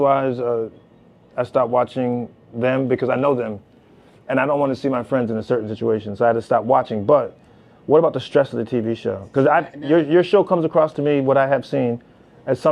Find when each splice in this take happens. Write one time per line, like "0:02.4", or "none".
none